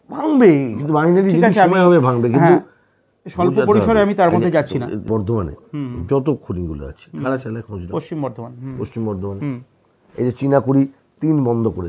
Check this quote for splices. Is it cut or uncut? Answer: cut